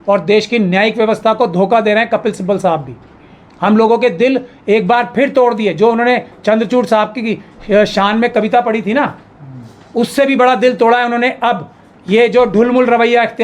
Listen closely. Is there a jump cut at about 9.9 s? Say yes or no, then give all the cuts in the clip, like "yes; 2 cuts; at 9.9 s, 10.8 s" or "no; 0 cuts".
no; 0 cuts